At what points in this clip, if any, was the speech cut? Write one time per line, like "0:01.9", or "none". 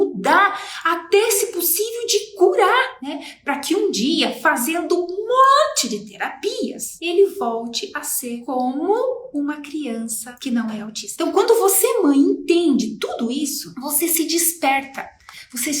0:11.0

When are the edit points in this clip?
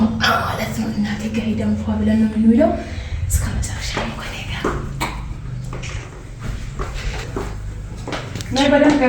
0:07.2

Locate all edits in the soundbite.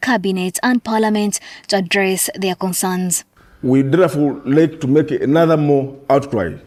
none

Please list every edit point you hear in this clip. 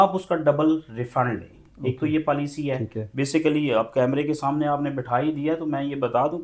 none

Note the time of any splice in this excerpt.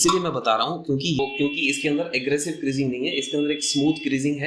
0:01.2

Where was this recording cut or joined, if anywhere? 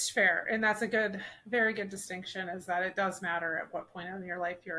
none

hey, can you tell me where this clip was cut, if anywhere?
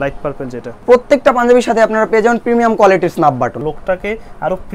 0:00.8
0:03.6

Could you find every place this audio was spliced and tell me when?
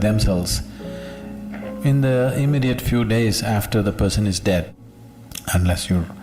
0:04.7

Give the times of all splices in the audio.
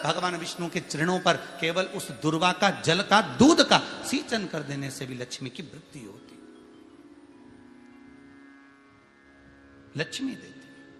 none

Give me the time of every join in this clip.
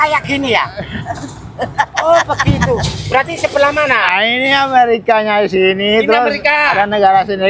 none

